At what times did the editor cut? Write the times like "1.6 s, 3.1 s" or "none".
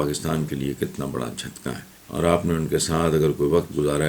1.9 s